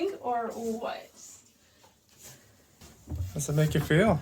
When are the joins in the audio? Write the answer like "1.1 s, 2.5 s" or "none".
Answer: 2.8 s